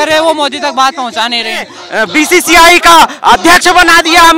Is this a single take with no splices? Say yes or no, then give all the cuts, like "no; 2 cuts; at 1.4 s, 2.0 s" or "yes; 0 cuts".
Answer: no; 1 cut; at 1.8 s